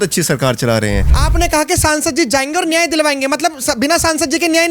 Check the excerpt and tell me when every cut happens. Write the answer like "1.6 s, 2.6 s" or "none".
1.1 s